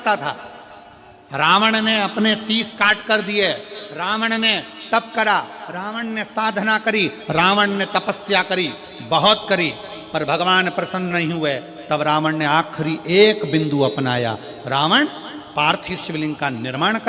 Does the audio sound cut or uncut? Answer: uncut